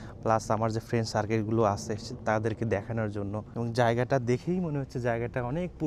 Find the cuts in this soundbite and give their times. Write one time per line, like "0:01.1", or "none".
0:03.4